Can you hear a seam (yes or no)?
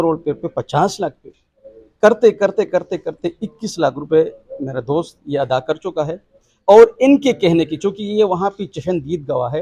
no